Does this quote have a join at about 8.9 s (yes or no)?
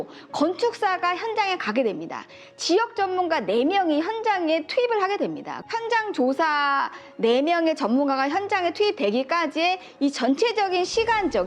no